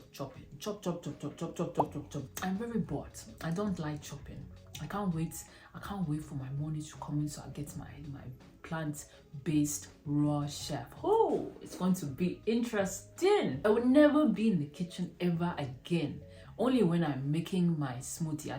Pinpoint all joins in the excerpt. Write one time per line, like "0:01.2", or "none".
0:02.3
0:13.6